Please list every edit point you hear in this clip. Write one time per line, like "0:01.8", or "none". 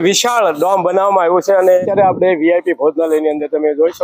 0:01.8